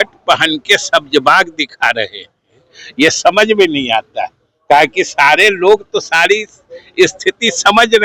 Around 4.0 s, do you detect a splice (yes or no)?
no